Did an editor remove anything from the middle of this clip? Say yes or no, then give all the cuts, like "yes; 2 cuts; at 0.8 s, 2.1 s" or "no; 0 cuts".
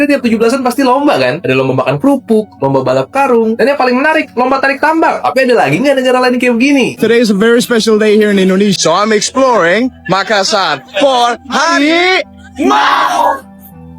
yes; 1 cut; at 7.0 s